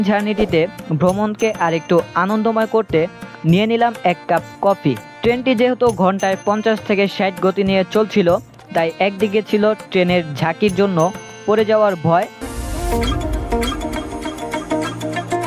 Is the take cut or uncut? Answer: cut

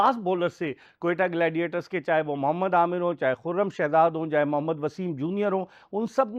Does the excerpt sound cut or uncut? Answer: uncut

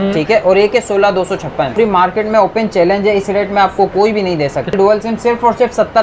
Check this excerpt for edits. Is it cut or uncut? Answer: cut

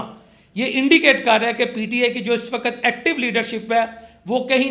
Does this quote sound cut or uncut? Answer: uncut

